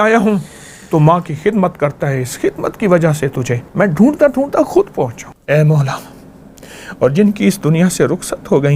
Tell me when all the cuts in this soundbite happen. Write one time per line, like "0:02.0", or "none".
0:03.6
0:05.3